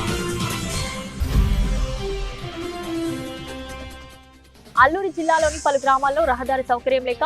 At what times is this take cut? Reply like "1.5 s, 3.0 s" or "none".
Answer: 1.1 s